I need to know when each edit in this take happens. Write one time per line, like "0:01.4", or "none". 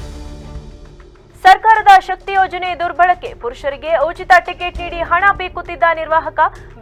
none